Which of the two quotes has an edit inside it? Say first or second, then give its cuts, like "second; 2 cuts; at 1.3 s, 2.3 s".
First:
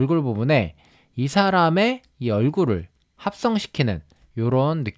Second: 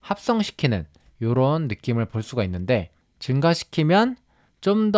second; 1 cut; at 3.0 s